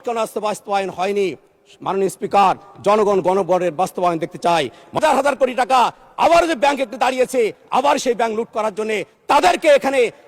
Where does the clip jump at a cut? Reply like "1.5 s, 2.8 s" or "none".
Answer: 5.0 s